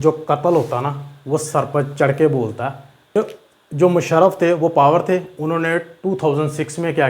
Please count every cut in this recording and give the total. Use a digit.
1